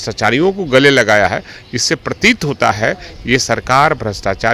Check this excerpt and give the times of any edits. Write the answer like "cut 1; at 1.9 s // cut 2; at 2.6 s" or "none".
none